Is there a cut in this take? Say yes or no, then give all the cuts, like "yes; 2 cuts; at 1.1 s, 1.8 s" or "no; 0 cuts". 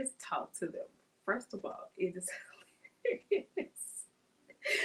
no; 0 cuts